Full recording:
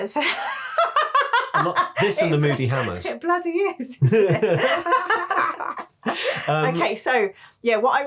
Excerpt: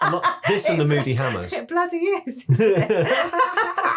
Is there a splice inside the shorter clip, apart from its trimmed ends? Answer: no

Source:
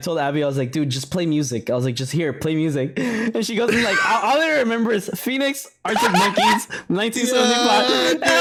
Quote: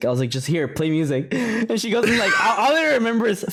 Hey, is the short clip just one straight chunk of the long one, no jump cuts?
yes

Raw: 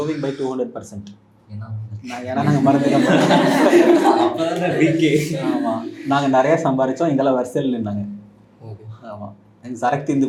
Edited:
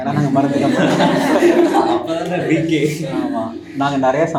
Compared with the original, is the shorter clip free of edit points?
yes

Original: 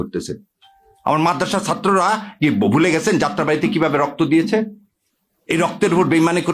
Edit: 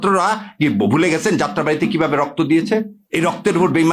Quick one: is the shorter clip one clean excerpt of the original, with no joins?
no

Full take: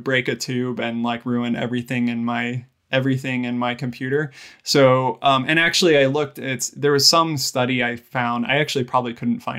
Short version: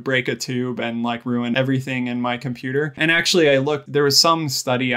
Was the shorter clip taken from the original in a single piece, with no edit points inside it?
no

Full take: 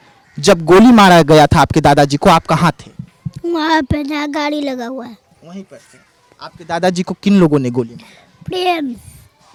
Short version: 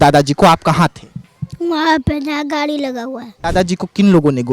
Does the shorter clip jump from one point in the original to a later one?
yes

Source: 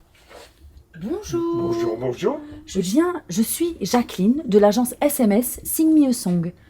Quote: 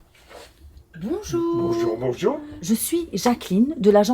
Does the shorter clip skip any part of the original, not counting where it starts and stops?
yes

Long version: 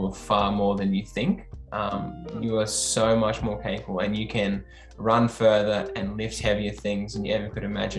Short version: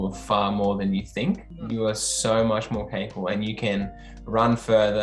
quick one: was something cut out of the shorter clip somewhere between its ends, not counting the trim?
yes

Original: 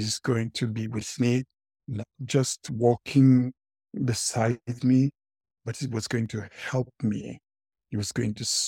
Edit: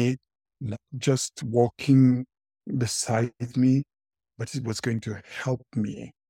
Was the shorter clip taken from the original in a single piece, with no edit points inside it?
yes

